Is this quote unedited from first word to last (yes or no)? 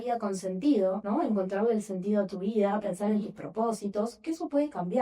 no